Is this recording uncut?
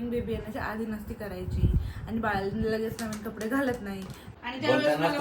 no; 1 cut; at 4.2 s

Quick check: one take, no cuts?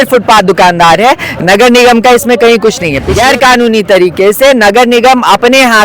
no; 1 cut; at 3.0 s

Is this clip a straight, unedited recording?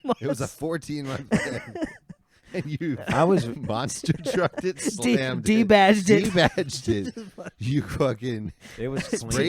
yes; 0 cuts

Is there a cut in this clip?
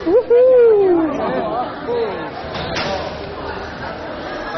yes; 1 cut; at 2.8 s

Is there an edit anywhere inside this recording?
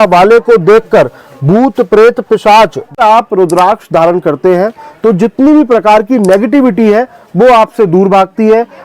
yes; 1 cut; at 3.0 s

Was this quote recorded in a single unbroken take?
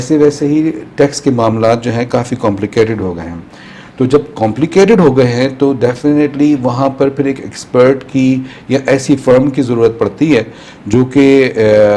yes; 0 cuts

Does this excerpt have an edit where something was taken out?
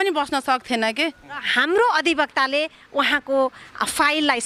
yes; 1 cut; at 1.5 s

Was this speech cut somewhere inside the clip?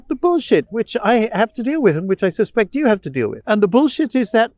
yes; 1 cut; at 3.4 s

